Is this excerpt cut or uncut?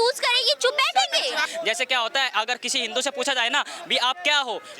cut